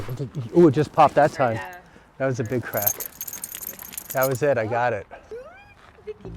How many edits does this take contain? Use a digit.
1